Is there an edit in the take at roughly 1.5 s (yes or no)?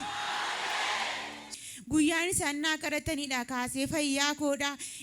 yes